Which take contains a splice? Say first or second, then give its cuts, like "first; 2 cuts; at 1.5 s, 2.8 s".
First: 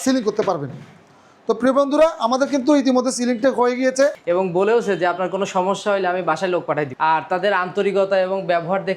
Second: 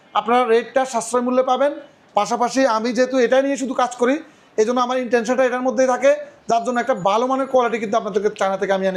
first; 2 cuts; at 4.2 s, 6.9 s